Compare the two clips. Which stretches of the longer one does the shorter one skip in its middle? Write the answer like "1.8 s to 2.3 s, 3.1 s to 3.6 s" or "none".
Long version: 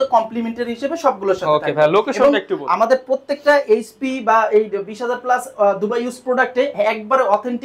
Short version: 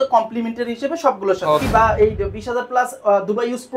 1.6 s to 4.2 s